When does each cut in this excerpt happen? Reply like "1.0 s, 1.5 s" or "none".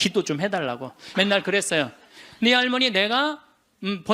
1.0 s